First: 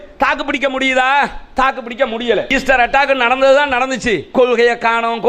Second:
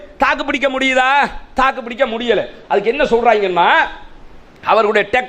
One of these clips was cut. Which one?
first; 2 cuts; at 2.5 s, 4.2 s

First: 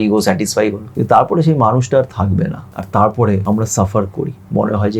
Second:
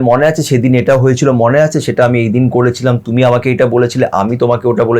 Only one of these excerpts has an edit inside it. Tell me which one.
first; 3 cuts; at 0.9 s, 2.7 s, 3.4 s

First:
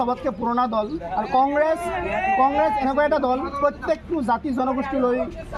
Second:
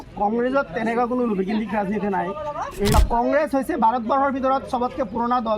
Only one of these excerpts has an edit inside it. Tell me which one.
second; 1 cut; at 2.9 s

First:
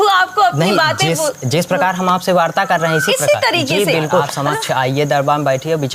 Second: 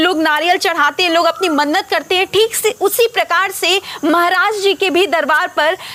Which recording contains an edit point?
first; 1 cut; at 4.3 s

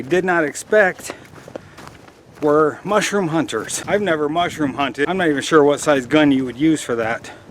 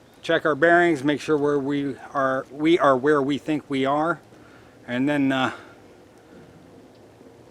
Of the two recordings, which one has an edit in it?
first; 2 cuts; at 3.8 s, 5.1 s

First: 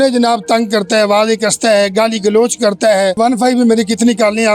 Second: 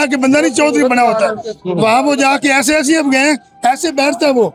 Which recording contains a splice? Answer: first; 1 cut; at 3.2 s

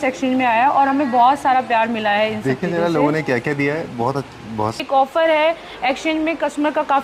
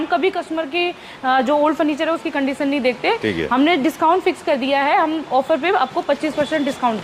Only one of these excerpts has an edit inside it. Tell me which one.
first; 1 cut; at 4.8 s

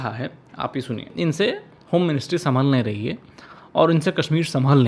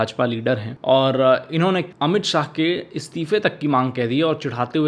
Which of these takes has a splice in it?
first; 1 cut; at 1.1 s

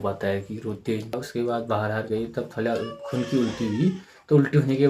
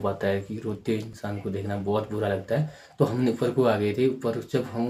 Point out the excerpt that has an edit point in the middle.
first; 1 cut; at 1.2 s

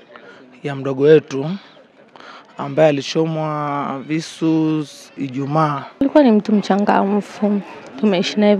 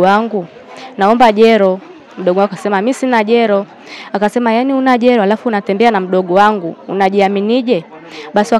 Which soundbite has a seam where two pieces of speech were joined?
first; 1 cut; at 6.0 s

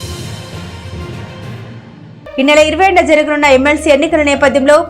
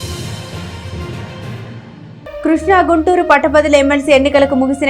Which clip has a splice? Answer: first; 1 cut; at 1.7 s

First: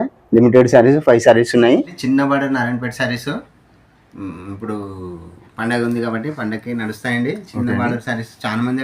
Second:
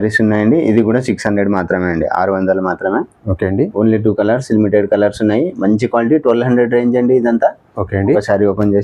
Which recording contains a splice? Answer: first; 1 cut; at 2.0 s

